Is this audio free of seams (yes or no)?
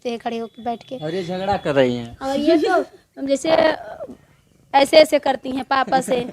yes